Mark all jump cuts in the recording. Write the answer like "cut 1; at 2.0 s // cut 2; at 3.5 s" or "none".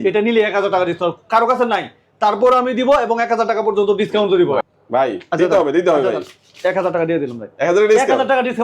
cut 1; at 4.6 s